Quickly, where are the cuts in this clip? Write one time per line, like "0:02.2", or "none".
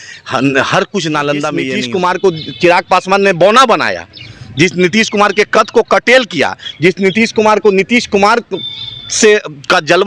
0:01.7